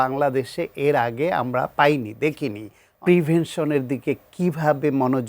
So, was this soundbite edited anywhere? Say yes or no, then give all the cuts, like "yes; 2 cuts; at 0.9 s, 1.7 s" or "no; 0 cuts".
yes; 1 cut; at 2.8 s